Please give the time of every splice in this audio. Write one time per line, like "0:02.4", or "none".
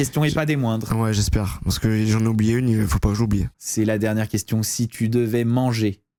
none